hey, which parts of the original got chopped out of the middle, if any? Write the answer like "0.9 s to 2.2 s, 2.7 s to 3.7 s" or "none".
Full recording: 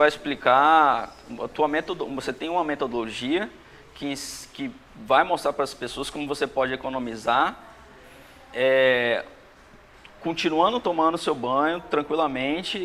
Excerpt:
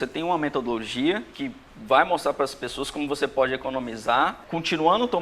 3.5 s to 4.5 s, 7.6 s to 10.1 s